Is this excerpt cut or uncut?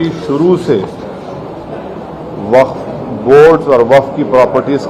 uncut